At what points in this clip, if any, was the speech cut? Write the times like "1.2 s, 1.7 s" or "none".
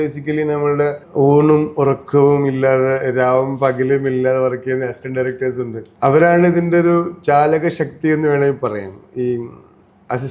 1.0 s, 5.8 s